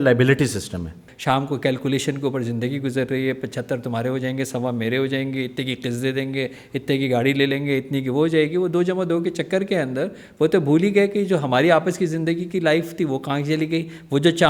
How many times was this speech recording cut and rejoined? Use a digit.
1